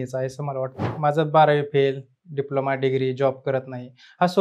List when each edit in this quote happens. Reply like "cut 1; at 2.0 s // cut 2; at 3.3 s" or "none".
cut 1; at 0.9 s